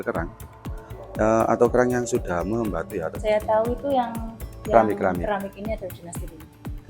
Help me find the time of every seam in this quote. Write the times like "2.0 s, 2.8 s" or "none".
3.2 s